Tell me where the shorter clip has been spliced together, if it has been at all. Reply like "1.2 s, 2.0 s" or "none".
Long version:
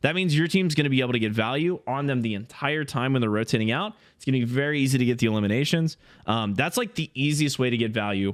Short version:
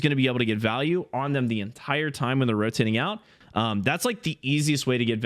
3.3 s